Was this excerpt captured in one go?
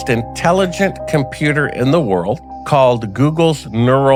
yes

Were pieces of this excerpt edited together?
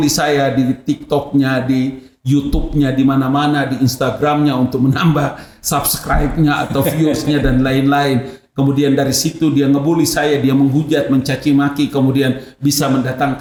no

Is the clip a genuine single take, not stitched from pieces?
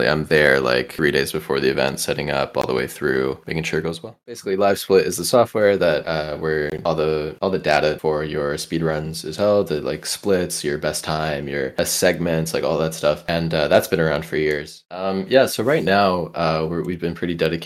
no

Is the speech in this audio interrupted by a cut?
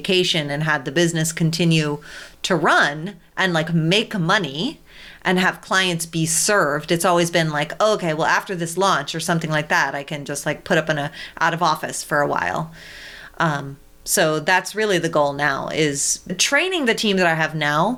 yes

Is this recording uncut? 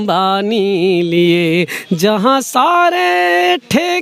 yes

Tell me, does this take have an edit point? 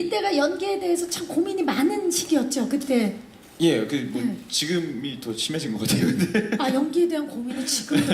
yes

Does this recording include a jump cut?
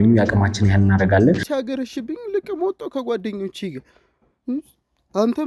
yes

